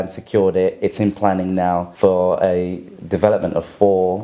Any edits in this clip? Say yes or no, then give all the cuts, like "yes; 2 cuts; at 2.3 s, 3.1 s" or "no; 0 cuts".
yes; 1 cut; at 1.9 s